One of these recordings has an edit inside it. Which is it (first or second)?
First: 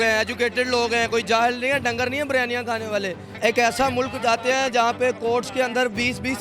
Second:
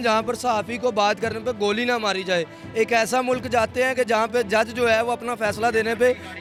first